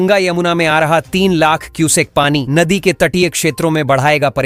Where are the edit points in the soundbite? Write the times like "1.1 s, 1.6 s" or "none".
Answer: none